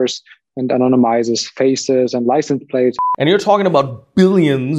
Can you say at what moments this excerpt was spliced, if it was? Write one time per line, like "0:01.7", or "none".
0:03.0